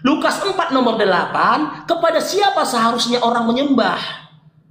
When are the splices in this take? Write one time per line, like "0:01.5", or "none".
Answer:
none